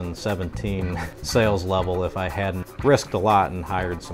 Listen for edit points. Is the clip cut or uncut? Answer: cut